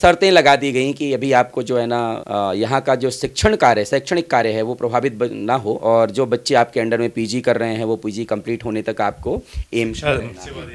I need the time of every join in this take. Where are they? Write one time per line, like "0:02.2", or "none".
none